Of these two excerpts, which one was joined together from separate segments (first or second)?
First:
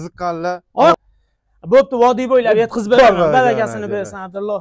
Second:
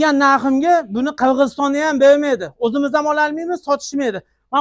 first